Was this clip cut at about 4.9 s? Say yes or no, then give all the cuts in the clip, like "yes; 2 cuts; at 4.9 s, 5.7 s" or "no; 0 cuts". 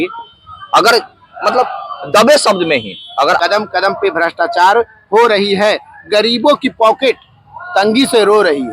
no; 1 cut; at 3.4 s